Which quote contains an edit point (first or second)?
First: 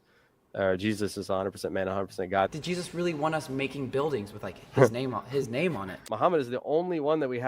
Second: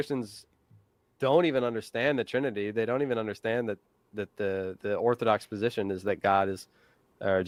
first